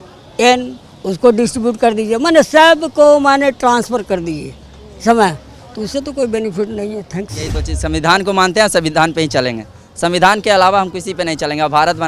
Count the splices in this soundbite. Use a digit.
1